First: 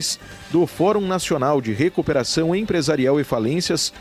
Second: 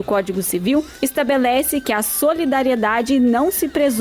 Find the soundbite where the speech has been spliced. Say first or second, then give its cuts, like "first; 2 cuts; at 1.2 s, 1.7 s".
second; 1 cut; at 0.9 s